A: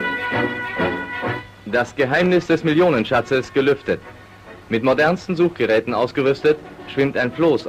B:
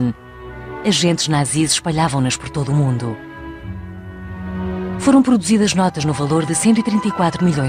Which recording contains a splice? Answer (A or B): B